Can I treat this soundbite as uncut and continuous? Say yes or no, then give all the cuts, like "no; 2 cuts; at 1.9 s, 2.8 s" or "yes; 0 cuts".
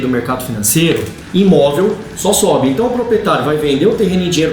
no; 1 cut; at 1.2 s